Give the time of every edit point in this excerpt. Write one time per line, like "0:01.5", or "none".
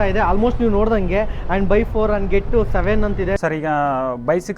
0:03.4